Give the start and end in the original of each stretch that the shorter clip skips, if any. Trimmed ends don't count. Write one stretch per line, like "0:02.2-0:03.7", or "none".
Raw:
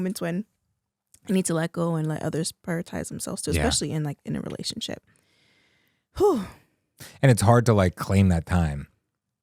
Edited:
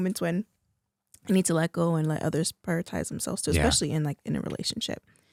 none